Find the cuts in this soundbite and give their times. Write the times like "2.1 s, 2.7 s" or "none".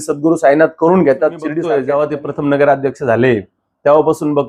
1.4 s